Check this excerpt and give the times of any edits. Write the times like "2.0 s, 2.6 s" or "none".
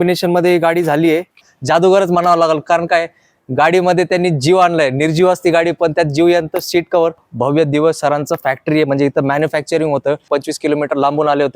1.5 s, 7.3 s, 10.2 s